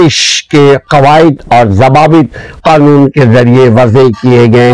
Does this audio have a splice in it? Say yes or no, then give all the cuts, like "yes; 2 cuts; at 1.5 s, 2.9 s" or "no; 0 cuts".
no; 0 cuts